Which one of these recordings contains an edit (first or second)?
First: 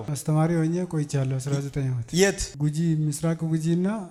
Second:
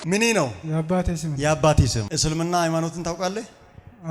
second